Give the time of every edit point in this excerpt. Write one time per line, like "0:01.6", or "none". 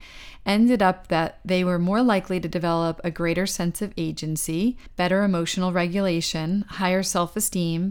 0:04.9